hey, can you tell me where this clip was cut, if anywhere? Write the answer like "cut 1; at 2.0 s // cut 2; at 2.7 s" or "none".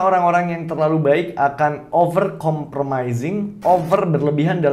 cut 1; at 3.5 s

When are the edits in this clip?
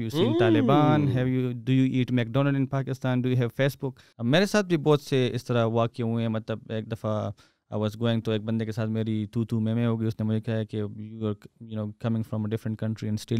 cut 1; at 4.0 s

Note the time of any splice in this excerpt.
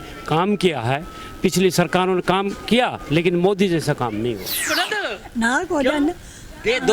cut 1; at 4.7 s

